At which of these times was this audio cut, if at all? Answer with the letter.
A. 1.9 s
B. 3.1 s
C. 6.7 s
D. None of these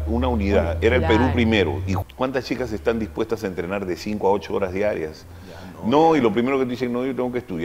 A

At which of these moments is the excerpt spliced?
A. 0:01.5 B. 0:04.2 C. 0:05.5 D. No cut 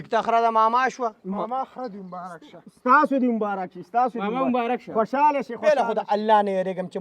C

